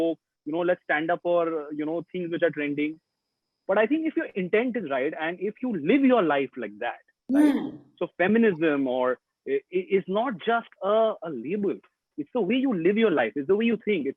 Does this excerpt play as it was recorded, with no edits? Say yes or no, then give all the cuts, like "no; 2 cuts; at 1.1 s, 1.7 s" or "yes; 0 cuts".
yes; 0 cuts